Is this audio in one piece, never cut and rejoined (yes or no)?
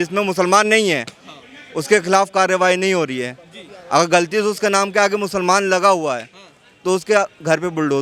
yes